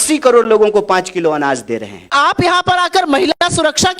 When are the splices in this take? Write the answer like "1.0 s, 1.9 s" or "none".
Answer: 2.1 s